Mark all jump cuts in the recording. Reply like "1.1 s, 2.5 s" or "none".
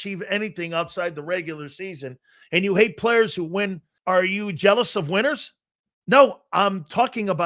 3.9 s